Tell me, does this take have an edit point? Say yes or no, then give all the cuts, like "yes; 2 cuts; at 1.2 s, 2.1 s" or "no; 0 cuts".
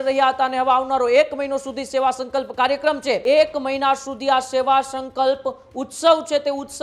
yes; 1 cut; at 3.2 s